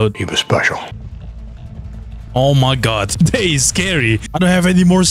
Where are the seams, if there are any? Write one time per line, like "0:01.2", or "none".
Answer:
0:01.0
0:04.3